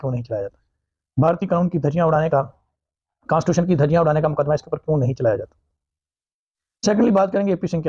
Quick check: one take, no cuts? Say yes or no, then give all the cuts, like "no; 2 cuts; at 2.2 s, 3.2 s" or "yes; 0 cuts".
yes; 0 cuts